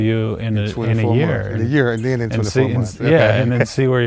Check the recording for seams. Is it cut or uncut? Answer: uncut